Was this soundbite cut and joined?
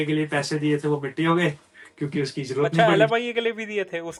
no; 0 cuts

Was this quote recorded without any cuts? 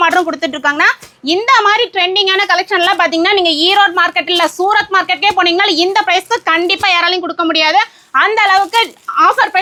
yes; 0 cuts

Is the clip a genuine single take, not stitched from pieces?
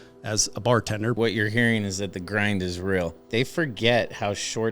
no; 2 cuts; at 1.2 s, 3.2 s

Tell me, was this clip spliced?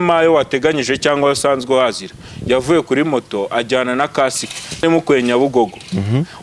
yes; 1 cut; at 4.8 s

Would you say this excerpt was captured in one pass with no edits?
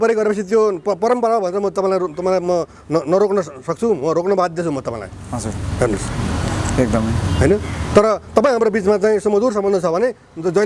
yes; 0 cuts

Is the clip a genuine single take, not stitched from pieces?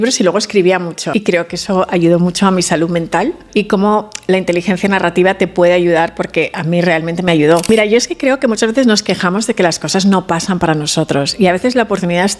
no; 3 cuts; at 1.0 s, 3.4 s, 7.6 s

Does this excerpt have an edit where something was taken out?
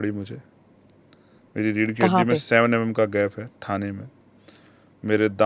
no; 0 cuts

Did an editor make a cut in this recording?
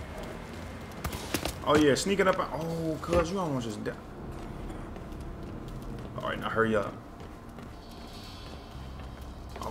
no; 0 cuts

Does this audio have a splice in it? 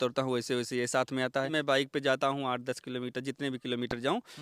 yes; 1 cut; at 1.5 s

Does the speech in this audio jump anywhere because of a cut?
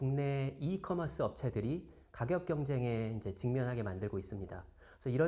no; 0 cuts

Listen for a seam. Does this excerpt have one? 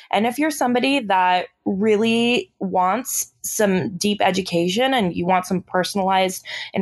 no; 0 cuts

